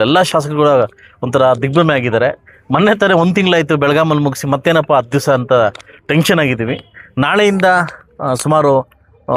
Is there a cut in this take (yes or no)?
no